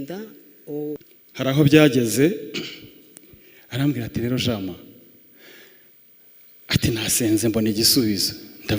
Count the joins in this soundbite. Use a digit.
1